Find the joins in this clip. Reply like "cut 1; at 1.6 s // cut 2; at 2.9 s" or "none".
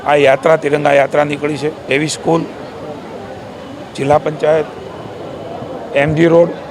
cut 1; at 1.8 s